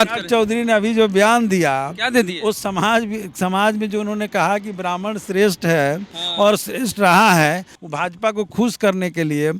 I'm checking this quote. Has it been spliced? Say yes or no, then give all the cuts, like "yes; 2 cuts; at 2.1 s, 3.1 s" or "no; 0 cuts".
yes; 1 cut; at 7.7 s